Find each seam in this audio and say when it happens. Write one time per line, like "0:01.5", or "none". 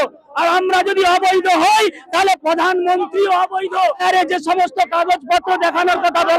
0:04.0

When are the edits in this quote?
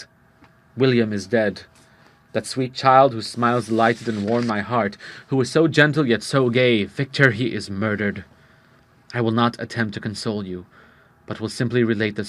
0:01.7

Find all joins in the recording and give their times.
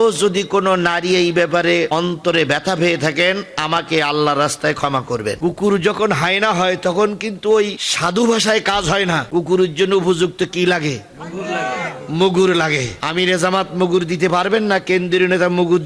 0:05.4

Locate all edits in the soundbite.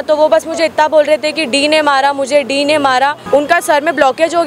0:03.2

